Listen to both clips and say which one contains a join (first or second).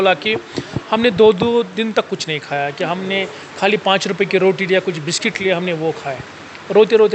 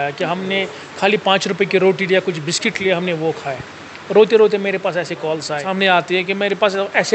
second